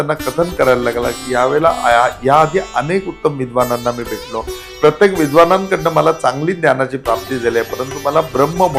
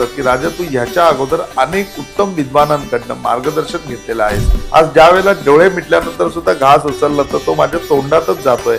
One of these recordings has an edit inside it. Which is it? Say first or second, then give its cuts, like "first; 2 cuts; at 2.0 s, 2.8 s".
second; 1 cut; at 4.5 s